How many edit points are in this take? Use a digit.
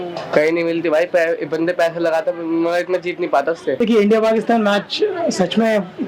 1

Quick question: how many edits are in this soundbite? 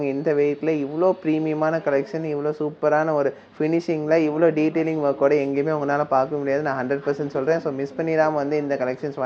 0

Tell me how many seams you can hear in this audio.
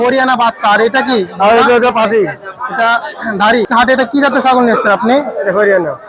1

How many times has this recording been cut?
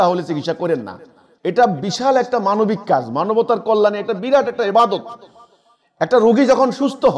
0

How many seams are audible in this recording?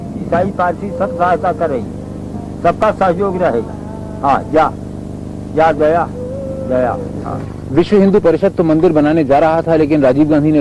1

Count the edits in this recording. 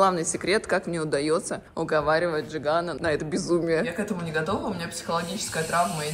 3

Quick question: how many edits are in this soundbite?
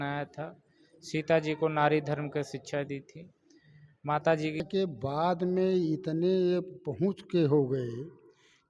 1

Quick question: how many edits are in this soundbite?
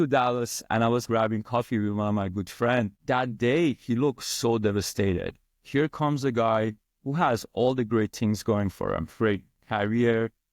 1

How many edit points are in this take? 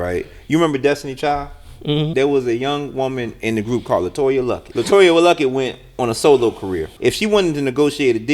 3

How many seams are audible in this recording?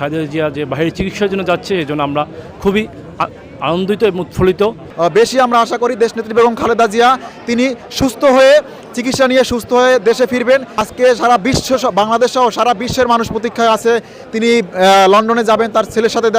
2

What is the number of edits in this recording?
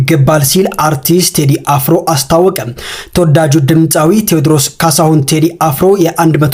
0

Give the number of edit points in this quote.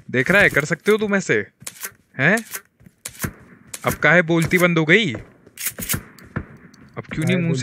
0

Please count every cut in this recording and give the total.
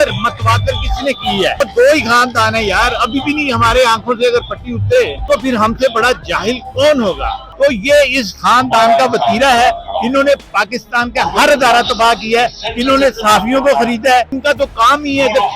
4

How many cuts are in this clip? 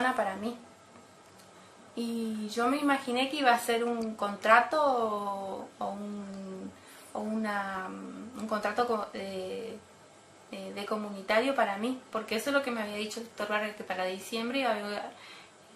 1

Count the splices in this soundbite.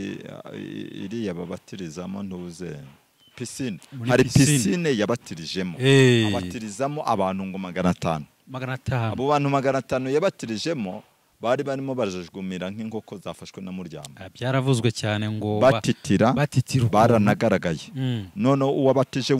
0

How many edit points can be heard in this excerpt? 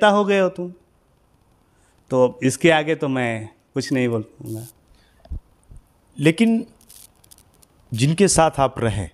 0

